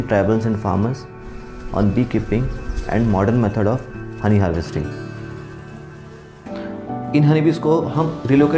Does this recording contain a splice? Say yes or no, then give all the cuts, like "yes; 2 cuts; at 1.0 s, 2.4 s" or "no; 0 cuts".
yes; 1 cut; at 6.4 s